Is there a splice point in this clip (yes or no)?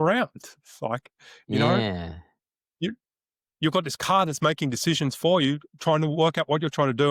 no